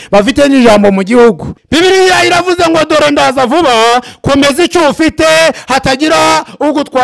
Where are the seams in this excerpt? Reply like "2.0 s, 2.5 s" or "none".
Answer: 1.5 s